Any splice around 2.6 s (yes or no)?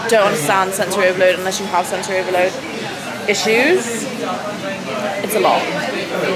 no